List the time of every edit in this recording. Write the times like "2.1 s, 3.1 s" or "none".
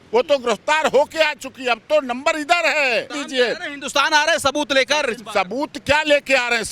3.2 s